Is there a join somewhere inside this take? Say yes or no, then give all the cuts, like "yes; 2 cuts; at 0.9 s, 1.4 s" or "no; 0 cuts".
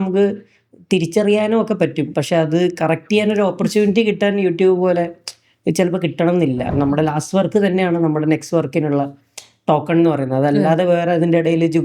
yes; 2 cuts; at 2.2 s, 6.7 s